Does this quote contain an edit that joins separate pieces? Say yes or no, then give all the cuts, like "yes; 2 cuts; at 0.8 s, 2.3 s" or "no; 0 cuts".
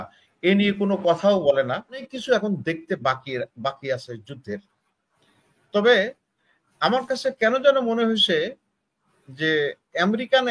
yes; 1 cut; at 2.1 s